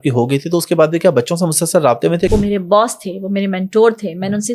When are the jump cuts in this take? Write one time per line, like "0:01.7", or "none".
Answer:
0:02.3